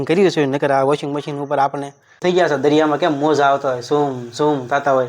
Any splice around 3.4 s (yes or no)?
no